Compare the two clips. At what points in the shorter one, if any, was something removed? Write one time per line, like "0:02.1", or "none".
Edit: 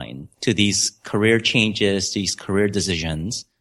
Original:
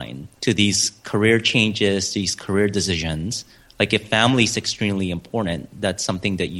none